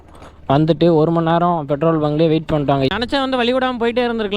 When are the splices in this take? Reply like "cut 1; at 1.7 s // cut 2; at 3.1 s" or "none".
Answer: cut 1; at 3.0 s